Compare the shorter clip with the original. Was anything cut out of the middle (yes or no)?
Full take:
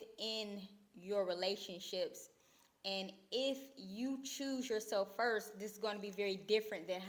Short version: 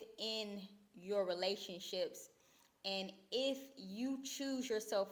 no